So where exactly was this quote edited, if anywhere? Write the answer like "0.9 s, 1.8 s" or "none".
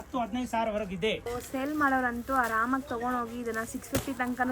1.3 s